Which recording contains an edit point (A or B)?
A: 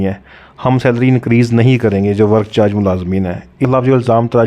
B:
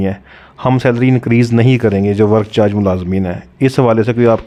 A